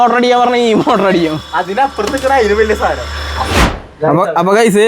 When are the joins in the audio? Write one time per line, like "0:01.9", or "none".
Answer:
0:03.6